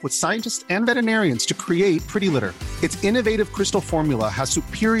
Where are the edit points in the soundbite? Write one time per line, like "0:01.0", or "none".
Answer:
none